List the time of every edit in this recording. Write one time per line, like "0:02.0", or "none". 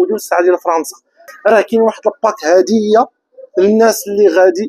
0:01.3